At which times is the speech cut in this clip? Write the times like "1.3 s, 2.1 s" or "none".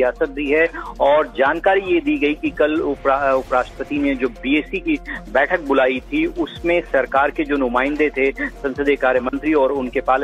2.5 s